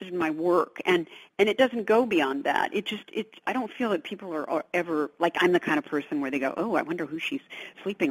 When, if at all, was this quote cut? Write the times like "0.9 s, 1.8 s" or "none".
none